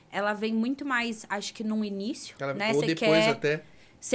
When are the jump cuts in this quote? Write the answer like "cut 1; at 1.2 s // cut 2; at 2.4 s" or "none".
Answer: none